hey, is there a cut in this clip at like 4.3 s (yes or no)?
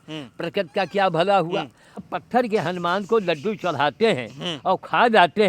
no